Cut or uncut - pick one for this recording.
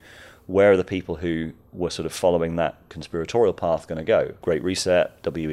cut